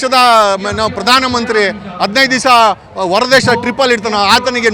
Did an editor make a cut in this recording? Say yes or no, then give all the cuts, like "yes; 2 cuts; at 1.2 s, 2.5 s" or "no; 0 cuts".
no; 0 cuts